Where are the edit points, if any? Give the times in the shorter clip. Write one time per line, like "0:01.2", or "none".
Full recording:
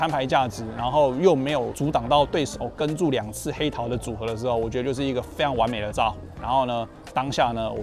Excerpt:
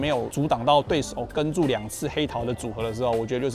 none